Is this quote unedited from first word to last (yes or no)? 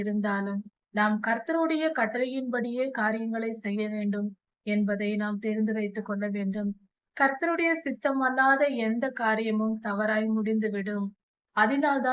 yes